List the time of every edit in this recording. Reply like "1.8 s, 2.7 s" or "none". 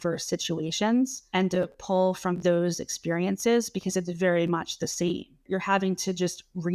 1.2 s, 5.5 s